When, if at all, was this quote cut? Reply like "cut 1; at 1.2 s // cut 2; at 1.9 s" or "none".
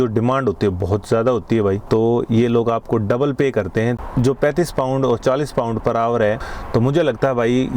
cut 1; at 1.8 s // cut 2; at 4.0 s // cut 3; at 6.4 s